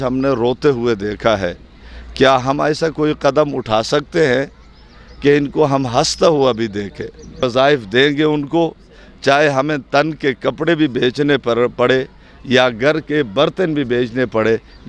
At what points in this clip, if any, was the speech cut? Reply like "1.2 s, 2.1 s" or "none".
7.4 s